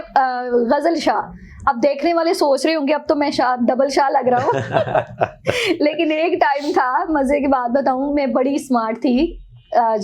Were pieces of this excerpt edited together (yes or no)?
no